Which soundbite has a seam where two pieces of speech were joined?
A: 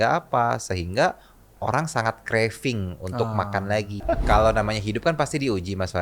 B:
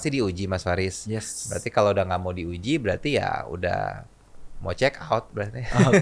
A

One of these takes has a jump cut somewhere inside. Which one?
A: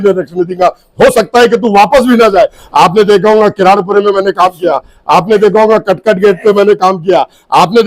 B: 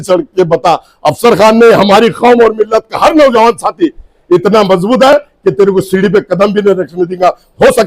A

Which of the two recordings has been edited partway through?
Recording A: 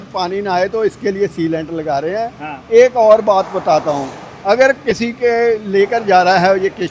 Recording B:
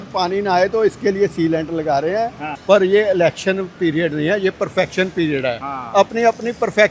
B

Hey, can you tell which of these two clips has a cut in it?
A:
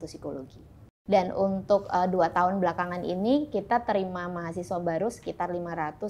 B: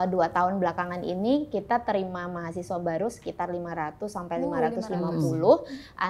A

